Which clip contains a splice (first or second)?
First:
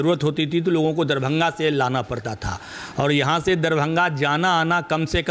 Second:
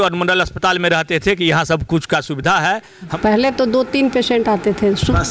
second